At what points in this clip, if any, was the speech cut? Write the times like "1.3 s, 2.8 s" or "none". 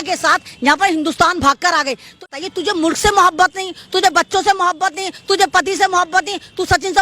2.3 s